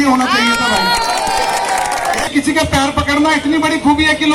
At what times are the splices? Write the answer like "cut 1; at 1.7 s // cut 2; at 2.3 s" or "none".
cut 1; at 2.3 s